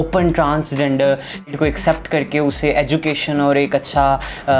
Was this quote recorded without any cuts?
no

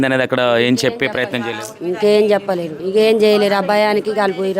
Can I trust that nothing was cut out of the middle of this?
no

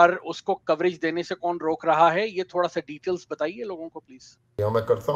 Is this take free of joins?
yes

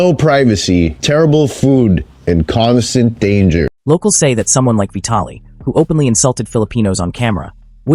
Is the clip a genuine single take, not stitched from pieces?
yes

